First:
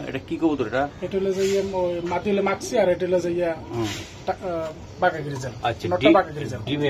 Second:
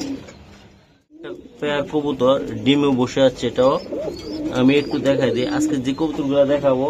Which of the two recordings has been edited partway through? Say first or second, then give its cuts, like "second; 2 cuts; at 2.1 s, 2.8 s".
second; 1 cut; at 1.4 s